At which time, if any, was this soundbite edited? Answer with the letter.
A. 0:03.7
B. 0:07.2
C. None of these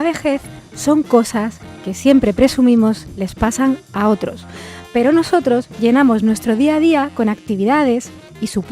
B